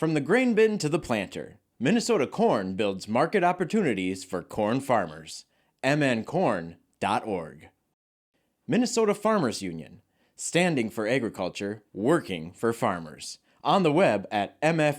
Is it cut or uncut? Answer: uncut